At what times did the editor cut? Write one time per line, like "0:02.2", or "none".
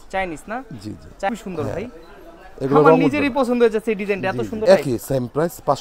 0:01.3
0:04.6